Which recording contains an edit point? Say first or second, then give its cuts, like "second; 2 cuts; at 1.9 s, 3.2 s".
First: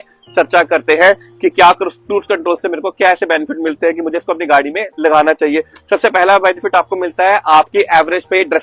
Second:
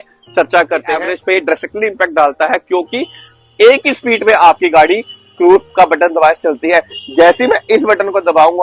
second; 1 cut; at 0.9 s